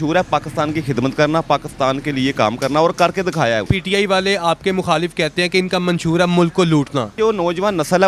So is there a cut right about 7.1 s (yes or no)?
yes